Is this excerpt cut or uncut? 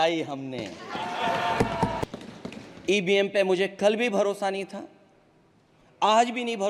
cut